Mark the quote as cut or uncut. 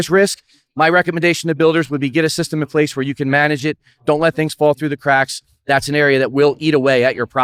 uncut